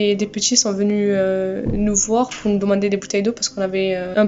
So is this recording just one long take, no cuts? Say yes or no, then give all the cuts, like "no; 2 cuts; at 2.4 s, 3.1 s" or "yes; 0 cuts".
yes; 0 cuts